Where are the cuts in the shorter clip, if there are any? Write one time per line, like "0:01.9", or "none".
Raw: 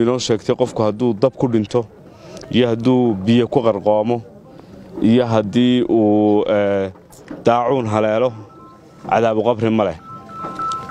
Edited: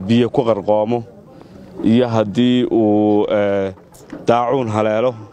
none